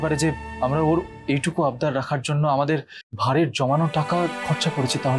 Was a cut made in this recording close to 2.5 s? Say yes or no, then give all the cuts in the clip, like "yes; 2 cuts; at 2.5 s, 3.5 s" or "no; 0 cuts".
no; 0 cuts